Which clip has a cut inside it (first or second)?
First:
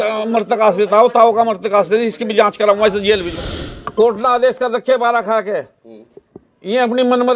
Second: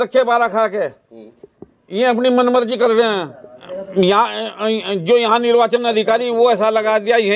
first